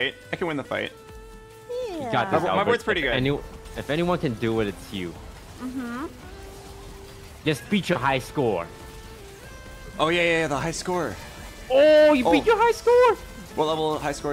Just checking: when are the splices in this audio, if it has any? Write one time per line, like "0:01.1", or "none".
none